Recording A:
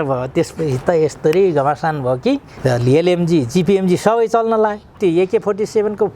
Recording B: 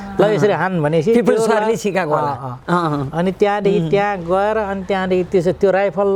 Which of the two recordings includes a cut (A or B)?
A